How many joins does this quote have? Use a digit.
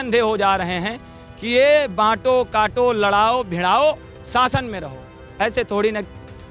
0